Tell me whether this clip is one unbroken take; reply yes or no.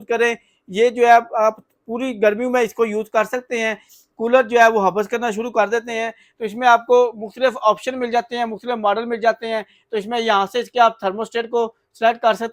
yes